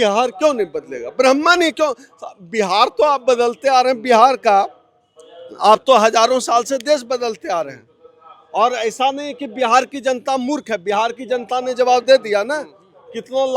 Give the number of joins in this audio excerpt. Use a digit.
0